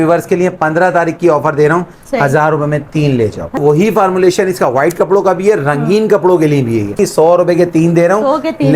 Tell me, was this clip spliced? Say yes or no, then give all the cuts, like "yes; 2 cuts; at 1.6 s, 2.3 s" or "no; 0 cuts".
yes; 2 cuts; at 3.6 s, 7.0 s